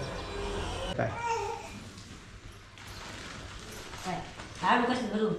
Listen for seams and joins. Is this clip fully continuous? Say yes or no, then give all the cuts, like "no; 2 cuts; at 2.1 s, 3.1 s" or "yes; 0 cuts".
no; 1 cut; at 0.9 s